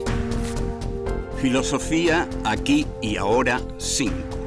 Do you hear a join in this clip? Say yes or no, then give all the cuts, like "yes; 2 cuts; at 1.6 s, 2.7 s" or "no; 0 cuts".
yes; 1 cut; at 2.9 s